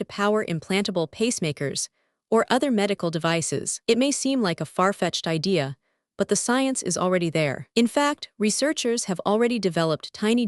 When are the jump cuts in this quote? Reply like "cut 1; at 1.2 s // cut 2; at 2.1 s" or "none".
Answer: none